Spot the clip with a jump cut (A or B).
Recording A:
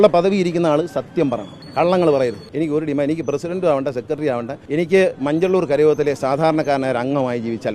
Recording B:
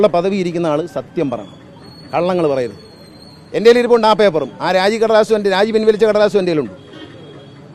A